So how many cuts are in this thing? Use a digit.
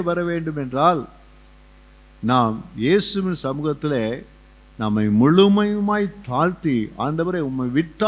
0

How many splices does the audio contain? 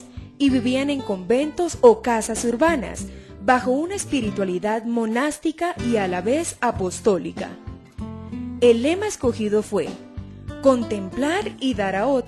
1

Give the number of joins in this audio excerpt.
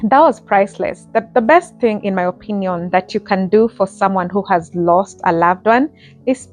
1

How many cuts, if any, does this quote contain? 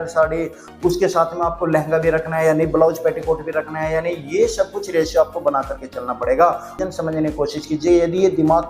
1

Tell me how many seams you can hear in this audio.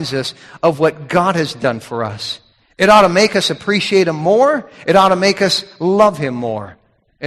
0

